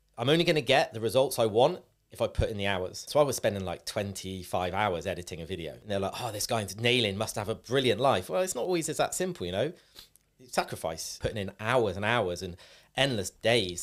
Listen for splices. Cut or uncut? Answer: cut